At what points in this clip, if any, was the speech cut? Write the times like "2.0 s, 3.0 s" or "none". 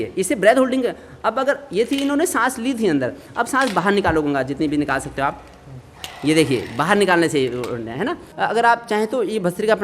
8.3 s